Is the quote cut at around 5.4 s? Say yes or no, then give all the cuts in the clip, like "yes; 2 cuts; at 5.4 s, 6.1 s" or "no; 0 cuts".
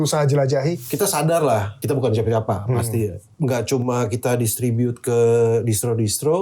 no; 3 cuts; at 0.8 s, 1.8 s, 3.2 s